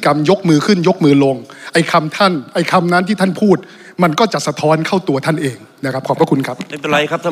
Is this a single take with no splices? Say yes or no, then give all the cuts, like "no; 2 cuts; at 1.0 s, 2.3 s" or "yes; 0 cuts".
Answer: yes; 0 cuts